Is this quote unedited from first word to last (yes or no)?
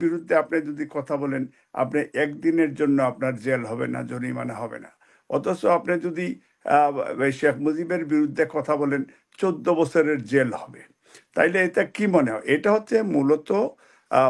yes